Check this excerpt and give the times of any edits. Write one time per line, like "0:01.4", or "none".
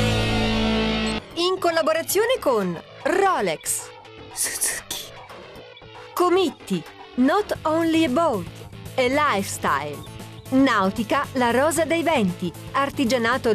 0:01.2